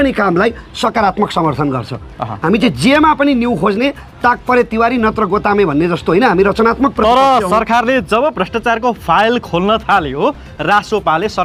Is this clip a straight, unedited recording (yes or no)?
yes